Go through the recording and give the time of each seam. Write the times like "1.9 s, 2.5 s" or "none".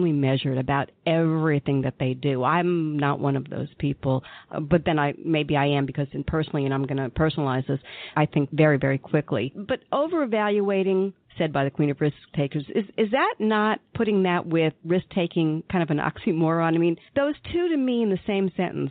8.4 s, 9.7 s